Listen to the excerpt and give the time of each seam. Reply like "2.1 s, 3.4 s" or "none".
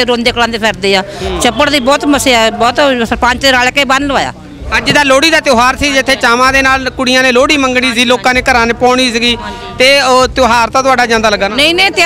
none

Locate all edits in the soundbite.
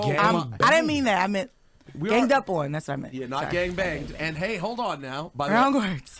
1.9 s

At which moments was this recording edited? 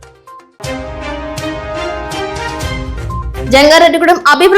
2.6 s

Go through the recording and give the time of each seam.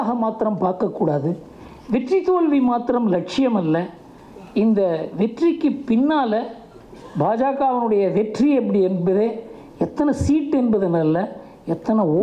none

